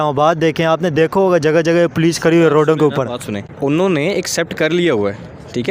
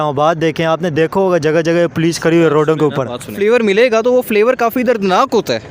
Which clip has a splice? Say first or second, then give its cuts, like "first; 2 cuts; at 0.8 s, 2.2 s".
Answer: second; 1 cut; at 3.3 s